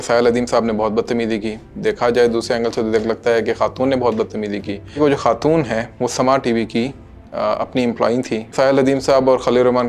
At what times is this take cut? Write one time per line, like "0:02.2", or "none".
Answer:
0:05.0
0:08.5